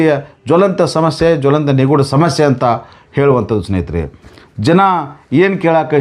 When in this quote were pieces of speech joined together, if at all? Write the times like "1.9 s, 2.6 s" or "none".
none